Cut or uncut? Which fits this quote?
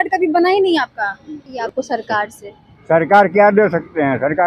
cut